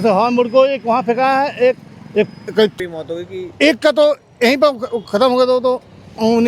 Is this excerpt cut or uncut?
cut